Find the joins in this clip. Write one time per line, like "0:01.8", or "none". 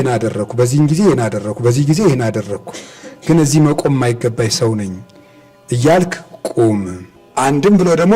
none